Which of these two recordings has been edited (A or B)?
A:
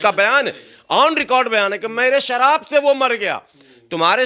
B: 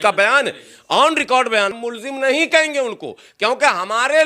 B